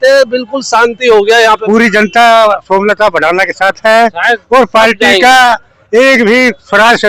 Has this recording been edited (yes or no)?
yes